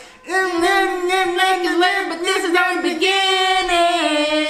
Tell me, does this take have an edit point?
no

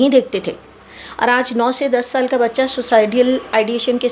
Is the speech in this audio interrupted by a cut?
no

